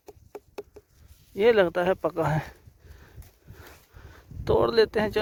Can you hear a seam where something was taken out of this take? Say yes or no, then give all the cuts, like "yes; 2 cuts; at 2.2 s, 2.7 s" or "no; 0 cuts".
no; 0 cuts